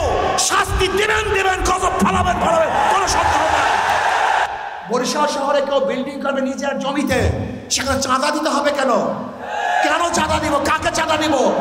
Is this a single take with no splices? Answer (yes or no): no